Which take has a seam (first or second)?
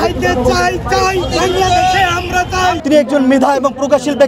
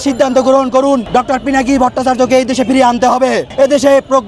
second